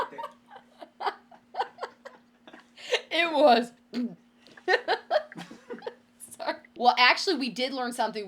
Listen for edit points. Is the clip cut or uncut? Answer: cut